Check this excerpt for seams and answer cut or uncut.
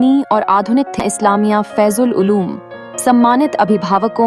cut